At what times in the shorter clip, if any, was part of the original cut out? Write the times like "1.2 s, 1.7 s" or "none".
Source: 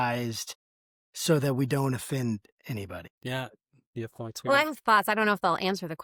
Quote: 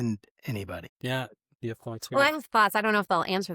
1.4 s